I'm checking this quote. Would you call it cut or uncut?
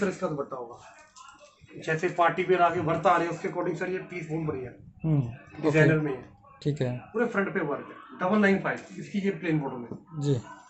uncut